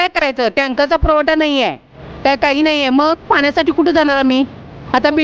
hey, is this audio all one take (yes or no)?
yes